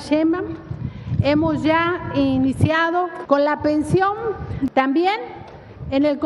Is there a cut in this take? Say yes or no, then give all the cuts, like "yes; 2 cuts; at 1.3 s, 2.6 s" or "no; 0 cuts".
yes; 2 cuts; at 3.1 s, 4.7 s